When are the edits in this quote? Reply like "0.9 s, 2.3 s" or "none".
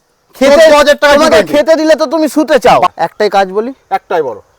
2.9 s